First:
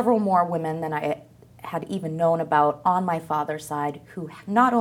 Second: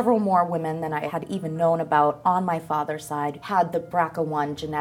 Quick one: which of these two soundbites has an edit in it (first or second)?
second